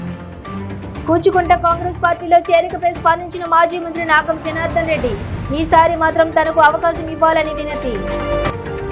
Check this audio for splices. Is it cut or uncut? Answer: cut